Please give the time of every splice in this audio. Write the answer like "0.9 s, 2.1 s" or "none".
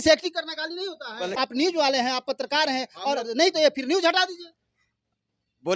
1.3 s